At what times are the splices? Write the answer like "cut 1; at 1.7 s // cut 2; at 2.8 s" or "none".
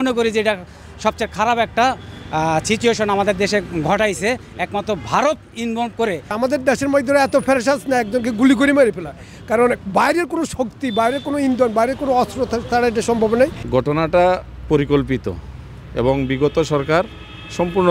cut 1; at 6.3 s // cut 2; at 13.6 s